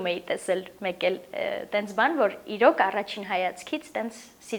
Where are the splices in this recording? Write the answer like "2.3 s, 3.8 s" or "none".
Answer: none